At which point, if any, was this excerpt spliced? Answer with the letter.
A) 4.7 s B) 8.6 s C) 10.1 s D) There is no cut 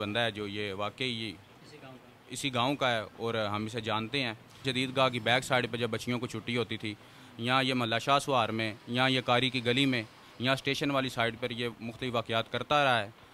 A